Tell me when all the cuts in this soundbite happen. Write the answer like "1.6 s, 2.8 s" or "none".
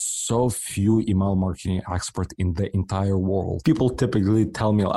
3.6 s